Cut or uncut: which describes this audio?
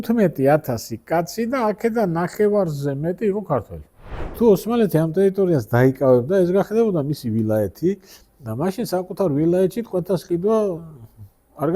cut